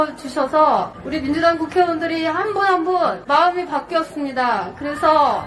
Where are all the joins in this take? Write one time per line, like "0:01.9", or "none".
0:01.0
0:03.2